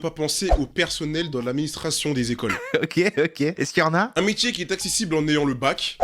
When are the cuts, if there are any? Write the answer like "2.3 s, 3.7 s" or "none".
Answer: none